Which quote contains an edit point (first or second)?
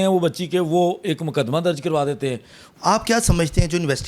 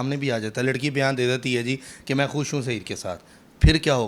first